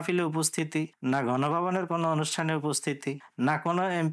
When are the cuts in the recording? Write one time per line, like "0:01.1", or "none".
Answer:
none